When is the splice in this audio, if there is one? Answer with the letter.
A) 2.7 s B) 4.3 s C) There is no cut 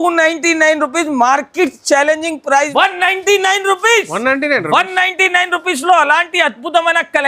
A